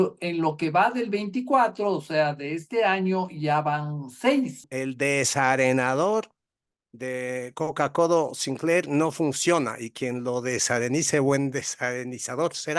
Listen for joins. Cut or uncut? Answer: cut